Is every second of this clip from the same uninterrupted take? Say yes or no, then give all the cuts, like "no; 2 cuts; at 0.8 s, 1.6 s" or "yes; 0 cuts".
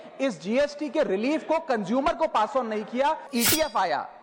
no; 1 cut; at 3.2 s